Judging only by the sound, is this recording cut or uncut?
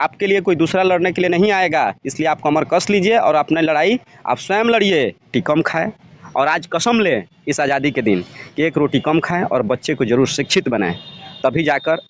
cut